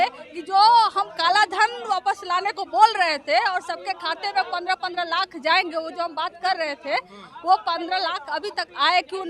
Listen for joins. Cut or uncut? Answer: uncut